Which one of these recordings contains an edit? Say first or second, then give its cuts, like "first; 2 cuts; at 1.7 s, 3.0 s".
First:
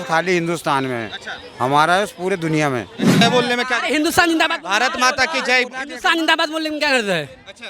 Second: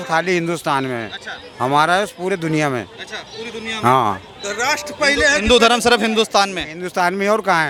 first; 1 cut; at 3.2 s